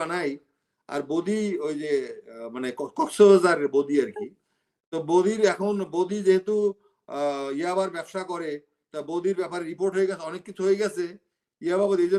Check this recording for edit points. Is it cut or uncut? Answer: uncut